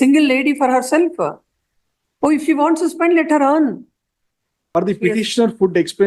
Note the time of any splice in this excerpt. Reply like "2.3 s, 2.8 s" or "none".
4.8 s